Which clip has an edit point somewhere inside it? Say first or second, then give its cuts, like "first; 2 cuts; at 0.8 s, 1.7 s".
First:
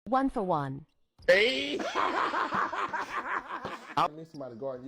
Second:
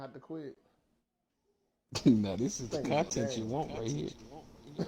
second; 1 cut; at 2.2 s